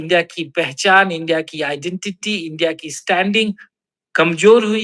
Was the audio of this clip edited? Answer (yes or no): no